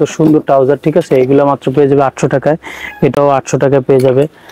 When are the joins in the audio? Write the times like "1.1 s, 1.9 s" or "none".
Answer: none

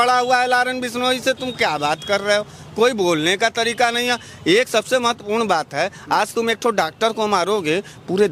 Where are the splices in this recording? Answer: none

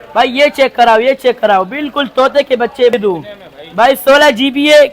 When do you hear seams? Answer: 2.9 s

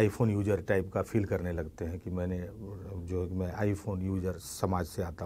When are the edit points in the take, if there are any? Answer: none

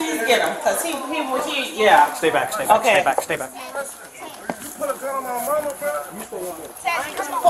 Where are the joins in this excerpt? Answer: none

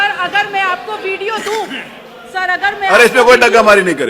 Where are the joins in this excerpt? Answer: none

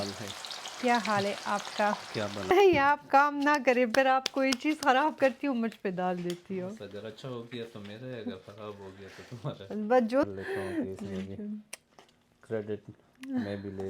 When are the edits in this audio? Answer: 2.5 s, 10.2 s

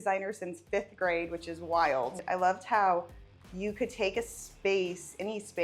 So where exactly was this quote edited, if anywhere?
2.2 s

